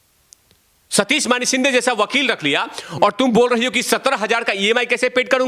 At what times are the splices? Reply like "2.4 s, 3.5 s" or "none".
none